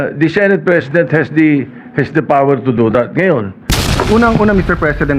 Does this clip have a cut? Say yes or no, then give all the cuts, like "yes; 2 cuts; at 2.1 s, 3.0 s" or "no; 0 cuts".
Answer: yes; 1 cut; at 3.9 s